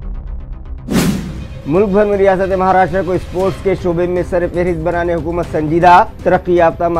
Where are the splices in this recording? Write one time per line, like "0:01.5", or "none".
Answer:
0:01.0